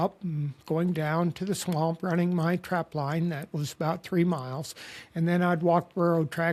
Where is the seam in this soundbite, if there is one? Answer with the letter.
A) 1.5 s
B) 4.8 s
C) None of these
C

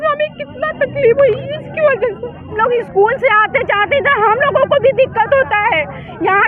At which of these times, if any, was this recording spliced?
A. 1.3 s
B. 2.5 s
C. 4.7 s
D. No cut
B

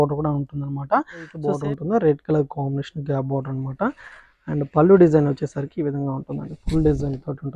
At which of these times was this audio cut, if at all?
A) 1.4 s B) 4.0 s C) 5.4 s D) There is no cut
A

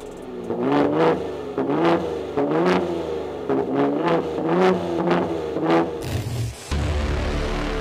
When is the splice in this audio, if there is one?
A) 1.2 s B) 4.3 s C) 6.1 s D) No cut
C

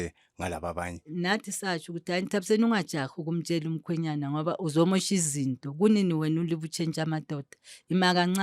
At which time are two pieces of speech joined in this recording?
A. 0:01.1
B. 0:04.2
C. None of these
A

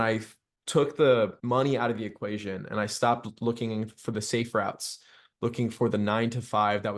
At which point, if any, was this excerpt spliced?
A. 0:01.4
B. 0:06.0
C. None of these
A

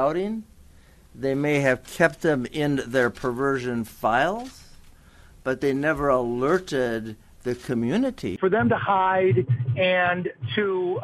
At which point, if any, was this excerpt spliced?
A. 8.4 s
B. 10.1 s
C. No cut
A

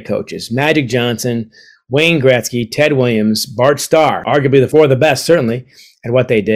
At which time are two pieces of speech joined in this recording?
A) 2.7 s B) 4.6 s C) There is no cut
B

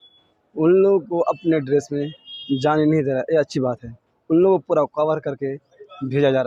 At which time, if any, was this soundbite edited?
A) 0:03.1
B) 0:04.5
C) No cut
C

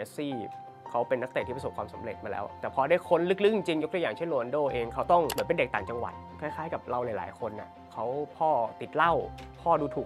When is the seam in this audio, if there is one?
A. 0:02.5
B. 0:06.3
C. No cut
A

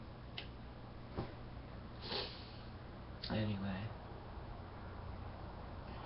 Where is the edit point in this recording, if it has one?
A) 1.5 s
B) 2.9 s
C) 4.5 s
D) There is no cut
B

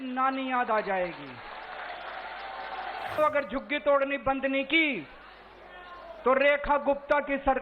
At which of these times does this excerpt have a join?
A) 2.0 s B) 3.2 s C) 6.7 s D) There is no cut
B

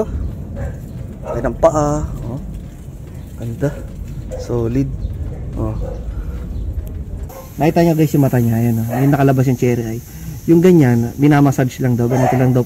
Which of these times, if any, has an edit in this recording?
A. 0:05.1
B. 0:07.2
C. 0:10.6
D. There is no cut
B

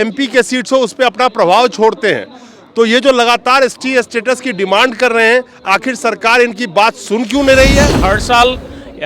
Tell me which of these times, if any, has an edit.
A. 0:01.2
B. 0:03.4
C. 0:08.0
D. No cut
C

